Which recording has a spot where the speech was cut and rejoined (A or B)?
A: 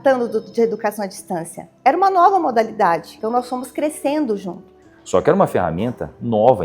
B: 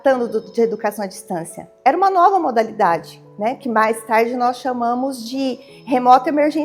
A